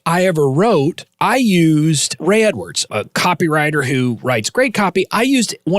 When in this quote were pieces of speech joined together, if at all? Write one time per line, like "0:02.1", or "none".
0:01.1
0:02.1
0:02.8